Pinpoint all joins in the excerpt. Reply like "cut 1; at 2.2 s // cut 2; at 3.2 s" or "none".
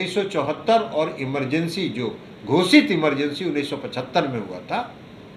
none